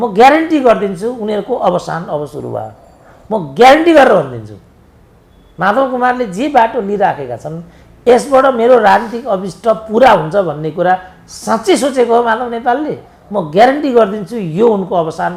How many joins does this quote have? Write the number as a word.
zero